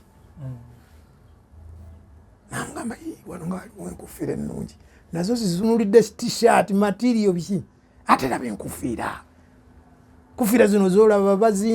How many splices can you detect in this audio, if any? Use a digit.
1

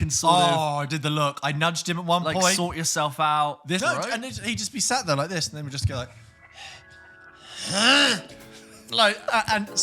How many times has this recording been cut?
1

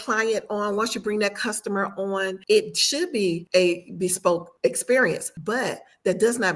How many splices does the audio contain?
4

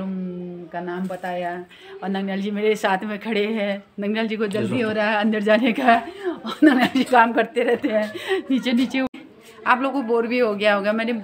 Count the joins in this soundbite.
1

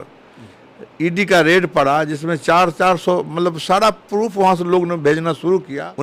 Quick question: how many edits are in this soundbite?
0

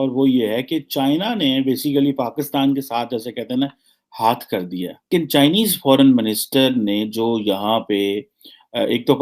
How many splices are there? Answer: 1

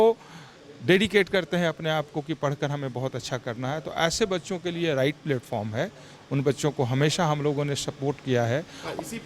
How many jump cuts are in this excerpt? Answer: 0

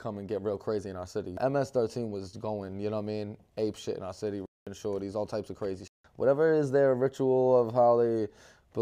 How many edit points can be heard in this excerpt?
2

